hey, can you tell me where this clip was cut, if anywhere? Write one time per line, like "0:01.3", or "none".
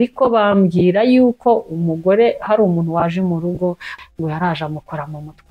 0:03.9